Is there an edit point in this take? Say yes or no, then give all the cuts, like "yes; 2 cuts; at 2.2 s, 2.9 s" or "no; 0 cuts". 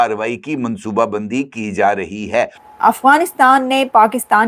yes; 1 cut; at 2.6 s